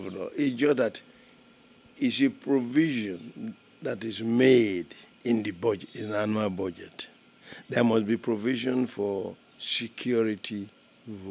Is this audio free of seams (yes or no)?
yes